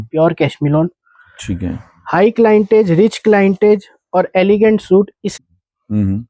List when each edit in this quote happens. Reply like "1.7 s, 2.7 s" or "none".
5.3 s